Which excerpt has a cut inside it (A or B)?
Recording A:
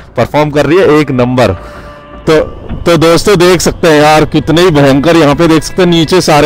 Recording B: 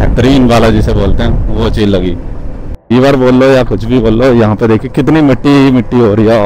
B